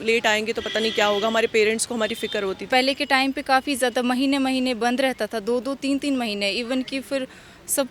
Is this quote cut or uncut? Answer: cut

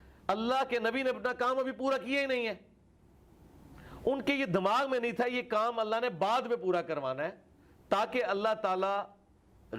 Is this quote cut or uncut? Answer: uncut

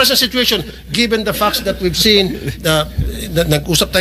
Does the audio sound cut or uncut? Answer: uncut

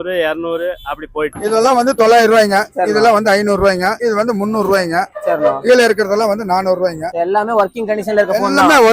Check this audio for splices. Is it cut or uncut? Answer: cut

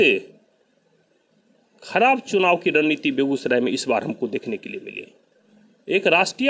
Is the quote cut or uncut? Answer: uncut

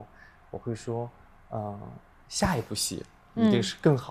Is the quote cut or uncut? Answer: uncut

